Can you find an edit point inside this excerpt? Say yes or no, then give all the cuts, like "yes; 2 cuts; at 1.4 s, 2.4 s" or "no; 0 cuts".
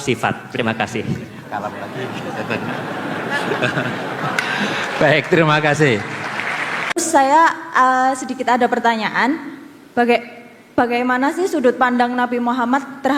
yes; 1 cut; at 6.8 s